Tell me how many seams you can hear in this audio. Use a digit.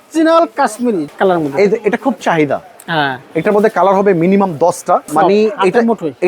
2